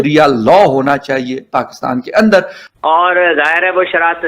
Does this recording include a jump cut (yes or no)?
yes